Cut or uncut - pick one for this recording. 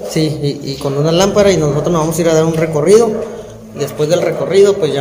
uncut